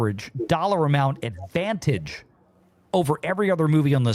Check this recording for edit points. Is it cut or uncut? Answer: uncut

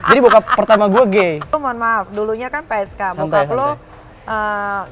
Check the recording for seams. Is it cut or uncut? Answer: cut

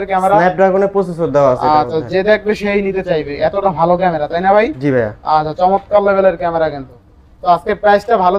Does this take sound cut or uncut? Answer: uncut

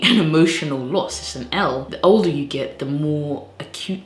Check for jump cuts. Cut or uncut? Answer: cut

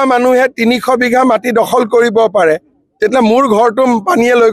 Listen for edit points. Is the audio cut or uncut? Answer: uncut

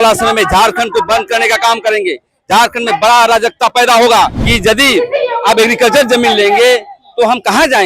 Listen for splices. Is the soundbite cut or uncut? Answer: cut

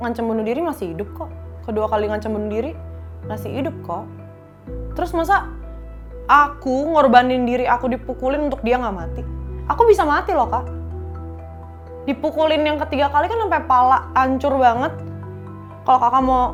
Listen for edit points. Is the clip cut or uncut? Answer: uncut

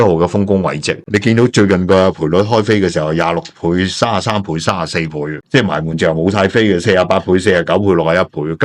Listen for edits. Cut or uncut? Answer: cut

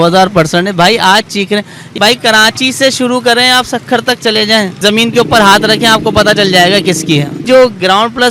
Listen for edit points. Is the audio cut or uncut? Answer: cut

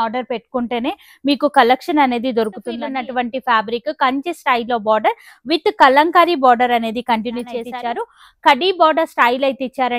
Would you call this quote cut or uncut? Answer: cut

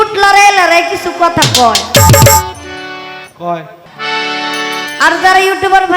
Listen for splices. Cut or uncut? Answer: cut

